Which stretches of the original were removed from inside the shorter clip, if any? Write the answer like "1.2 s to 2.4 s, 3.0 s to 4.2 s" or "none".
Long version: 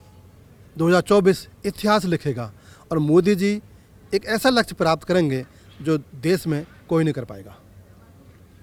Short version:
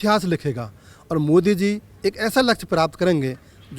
3.7 s to 4.0 s